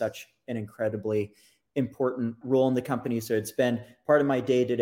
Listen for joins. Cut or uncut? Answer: cut